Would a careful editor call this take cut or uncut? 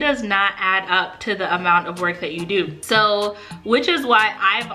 uncut